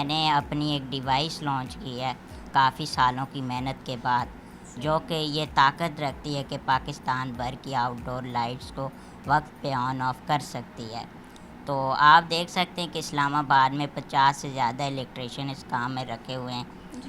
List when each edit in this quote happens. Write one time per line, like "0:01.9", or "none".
none